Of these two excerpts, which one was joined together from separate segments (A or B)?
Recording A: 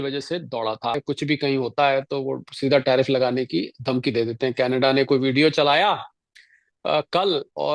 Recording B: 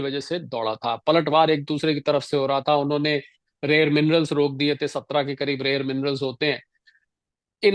A